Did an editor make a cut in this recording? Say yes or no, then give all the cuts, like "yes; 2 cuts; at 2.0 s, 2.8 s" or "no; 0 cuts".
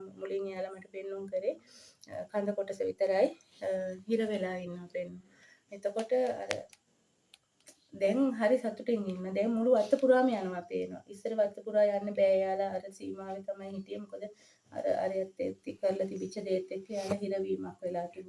no; 0 cuts